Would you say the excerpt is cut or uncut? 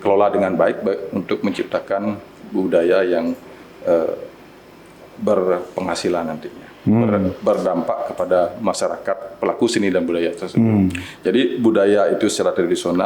uncut